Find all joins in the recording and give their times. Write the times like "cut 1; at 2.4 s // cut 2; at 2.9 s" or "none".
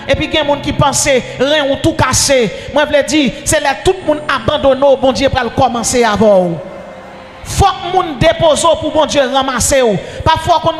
none